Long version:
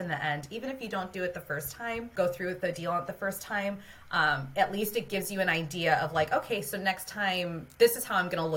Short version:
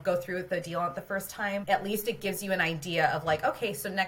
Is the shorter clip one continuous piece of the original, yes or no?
no